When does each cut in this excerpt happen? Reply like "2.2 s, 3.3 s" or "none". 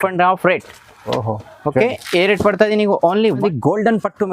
3.4 s